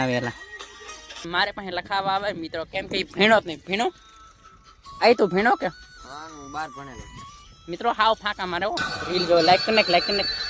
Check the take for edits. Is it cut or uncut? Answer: cut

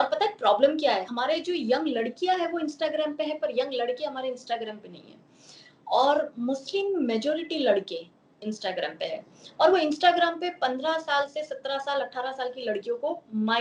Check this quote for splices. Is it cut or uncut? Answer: cut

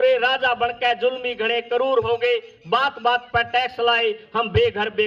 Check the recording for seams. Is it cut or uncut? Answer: uncut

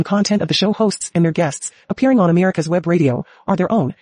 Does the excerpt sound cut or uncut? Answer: uncut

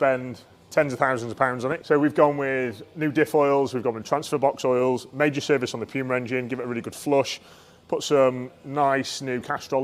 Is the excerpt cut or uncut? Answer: cut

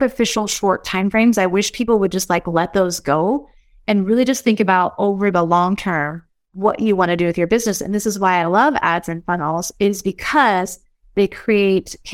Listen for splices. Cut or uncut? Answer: uncut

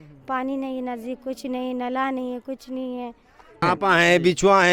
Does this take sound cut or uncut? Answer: cut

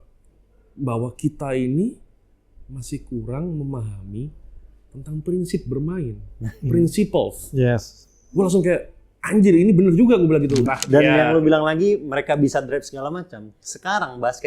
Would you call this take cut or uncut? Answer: cut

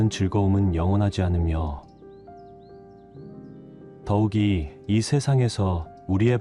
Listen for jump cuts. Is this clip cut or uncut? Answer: uncut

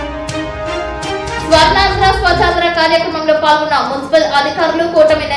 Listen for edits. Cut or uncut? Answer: cut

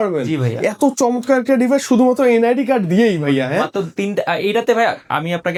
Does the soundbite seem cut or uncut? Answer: uncut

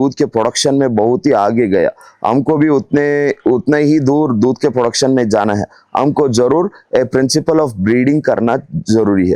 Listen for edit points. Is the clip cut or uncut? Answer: uncut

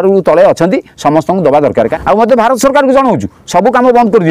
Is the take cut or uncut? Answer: cut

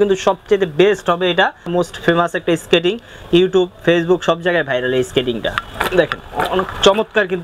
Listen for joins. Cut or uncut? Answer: cut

